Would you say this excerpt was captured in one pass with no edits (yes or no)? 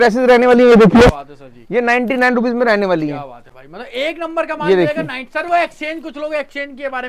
yes